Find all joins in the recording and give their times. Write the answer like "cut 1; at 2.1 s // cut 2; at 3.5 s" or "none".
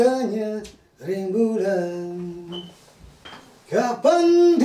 cut 1; at 3.3 s